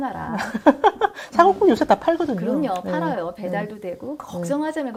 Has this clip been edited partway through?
no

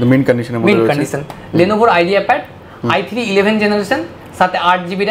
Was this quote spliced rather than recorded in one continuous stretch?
no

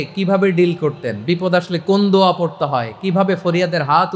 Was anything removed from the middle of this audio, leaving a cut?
no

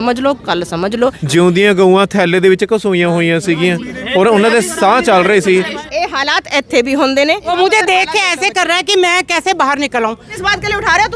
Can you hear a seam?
yes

